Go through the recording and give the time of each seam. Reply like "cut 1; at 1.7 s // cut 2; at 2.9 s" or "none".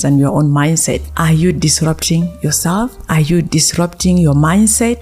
cut 1; at 1.0 s